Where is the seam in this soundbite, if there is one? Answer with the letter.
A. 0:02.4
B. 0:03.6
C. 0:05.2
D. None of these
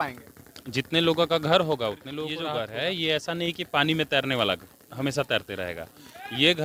A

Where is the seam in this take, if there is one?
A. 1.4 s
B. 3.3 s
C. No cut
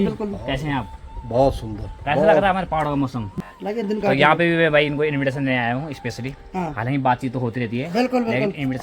B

